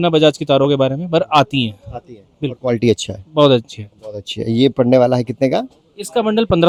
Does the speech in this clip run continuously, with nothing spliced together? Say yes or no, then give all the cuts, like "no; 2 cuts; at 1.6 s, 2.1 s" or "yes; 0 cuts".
yes; 0 cuts